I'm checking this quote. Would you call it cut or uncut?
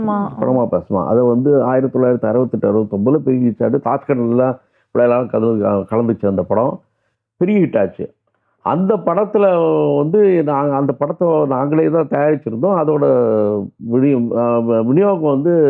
uncut